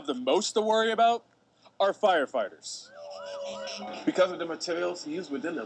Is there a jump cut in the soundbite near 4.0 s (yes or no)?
no